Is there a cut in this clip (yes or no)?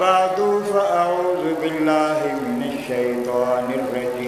no